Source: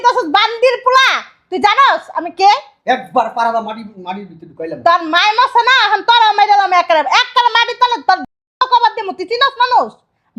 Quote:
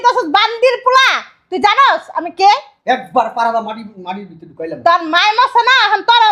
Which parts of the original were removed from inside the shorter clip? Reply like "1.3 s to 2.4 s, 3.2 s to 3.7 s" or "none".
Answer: none